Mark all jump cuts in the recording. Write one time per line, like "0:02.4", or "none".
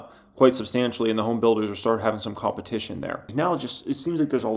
0:03.3